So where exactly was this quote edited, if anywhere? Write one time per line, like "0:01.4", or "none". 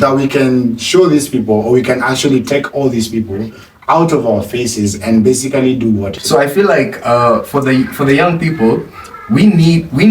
0:06.1